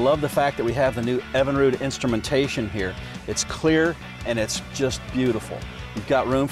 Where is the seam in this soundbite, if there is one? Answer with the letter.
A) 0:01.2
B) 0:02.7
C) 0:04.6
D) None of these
B